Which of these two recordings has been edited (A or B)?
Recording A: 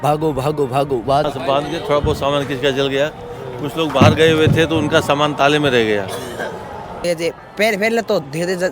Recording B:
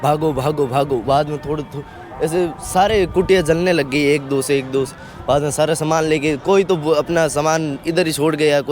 A